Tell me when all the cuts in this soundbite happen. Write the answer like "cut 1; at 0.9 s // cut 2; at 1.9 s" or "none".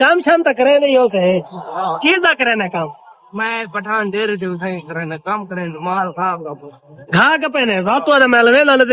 none

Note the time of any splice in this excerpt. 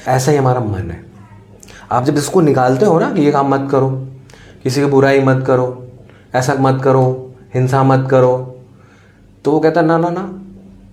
none

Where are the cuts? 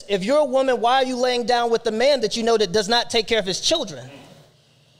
none

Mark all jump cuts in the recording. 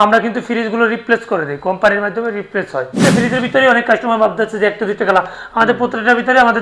cut 1; at 3.0 s

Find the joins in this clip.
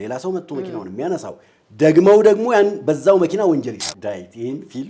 cut 1; at 3.9 s

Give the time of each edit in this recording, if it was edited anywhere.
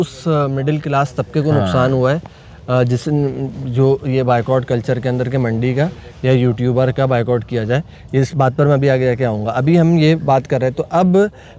none

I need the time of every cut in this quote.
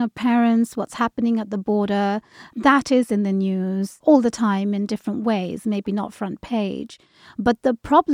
cut 1; at 2.5 s // cut 2; at 3.9 s

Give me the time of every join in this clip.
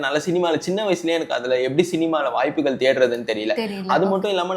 none

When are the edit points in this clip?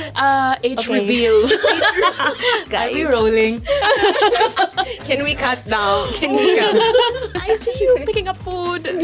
cut 1; at 2.7 s // cut 2; at 7.3 s

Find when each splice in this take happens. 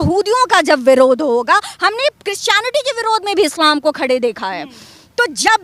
none

